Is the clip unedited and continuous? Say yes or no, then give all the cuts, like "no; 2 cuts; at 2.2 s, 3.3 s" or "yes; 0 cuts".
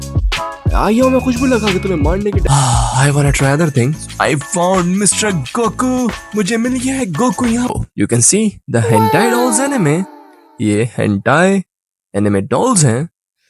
no; 2 cuts; at 2.4 s, 7.7 s